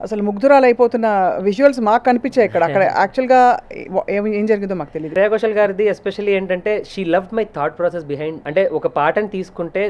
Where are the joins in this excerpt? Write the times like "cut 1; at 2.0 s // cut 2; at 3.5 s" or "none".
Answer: cut 1; at 5.1 s // cut 2; at 8.4 s